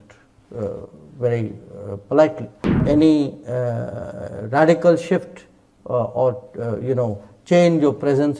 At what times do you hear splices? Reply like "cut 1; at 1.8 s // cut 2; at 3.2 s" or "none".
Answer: cut 1; at 2.8 s